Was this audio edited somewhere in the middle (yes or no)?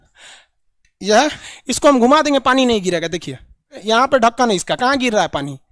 yes